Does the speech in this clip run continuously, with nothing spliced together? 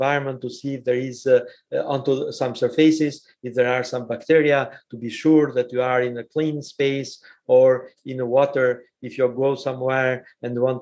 yes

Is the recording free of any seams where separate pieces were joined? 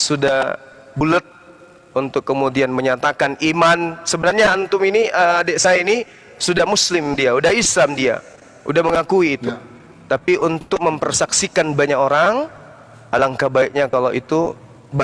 yes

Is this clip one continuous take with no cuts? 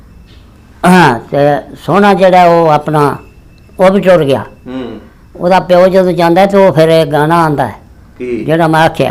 yes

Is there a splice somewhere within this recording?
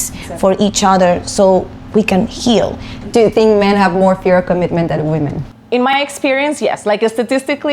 yes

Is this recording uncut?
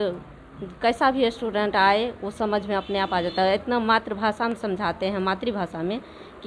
yes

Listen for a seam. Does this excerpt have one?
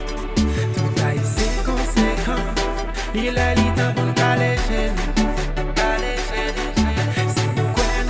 no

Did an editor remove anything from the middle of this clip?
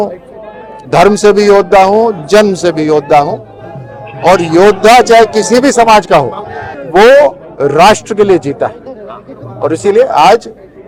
no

